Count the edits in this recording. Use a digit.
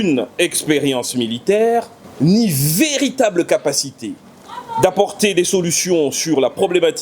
1